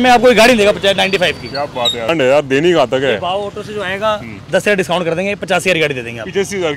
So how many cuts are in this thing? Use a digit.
1